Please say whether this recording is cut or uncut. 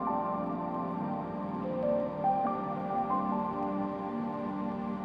uncut